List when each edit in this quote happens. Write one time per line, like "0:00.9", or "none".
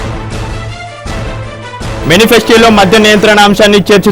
0:01.5

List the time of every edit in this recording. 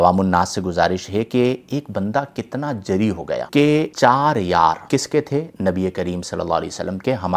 none

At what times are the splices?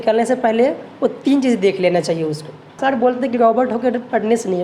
0:02.8

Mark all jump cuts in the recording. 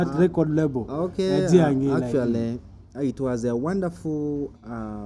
none

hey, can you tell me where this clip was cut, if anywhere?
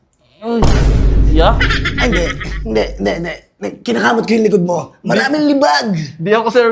none

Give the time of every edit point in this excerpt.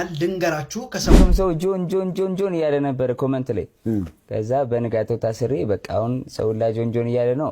0:01.2

